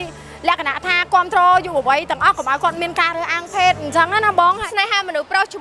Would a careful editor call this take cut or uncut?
cut